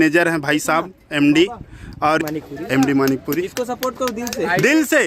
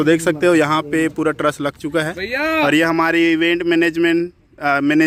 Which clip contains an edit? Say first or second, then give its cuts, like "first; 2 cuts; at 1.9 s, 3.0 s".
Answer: first; 1 cut; at 2.2 s